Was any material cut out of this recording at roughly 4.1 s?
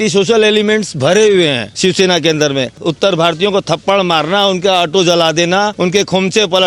no; 2 cuts; at 2.8 s, 5.7 s

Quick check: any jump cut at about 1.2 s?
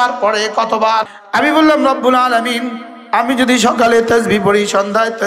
yes; 1 cut; at 1.2 s

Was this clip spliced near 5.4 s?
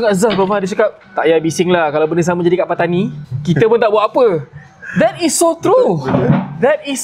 no; 2 cuts; at 1.1 s, 3.3 s

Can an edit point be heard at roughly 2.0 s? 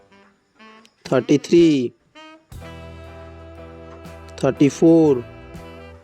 yes; 4 cuts; at 1.0 s, 2.0 s, 3.8 s, 5.2 s

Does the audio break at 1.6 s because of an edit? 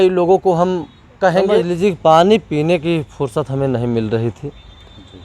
yes; 1 cut; at 1.6 s

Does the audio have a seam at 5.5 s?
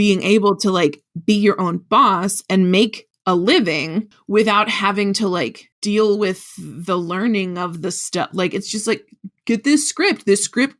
no; 0 cuts

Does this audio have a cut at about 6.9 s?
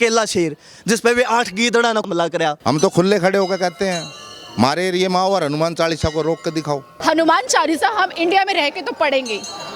yes; 2 cuts; at 2.6 s, 6.9 s

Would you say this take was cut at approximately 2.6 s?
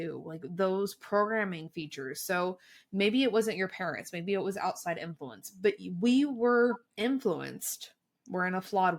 no; 1 cut; at 6.9 s

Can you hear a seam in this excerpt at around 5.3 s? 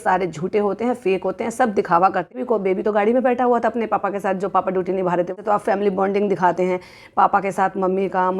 yes; 2 cuts; at 2.4 s, 5.3 s

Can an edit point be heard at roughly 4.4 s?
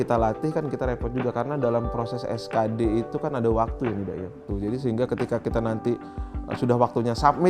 yes; 1 cut; at 4.4 s

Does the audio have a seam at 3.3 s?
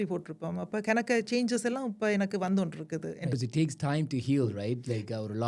yes; 1 cut; at 3.3 s

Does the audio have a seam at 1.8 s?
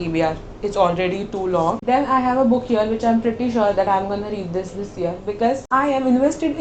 no; 0 cuts

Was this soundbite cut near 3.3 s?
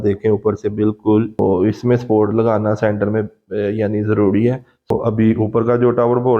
no; 2 cuts; at 1.4 s, 4.9 s

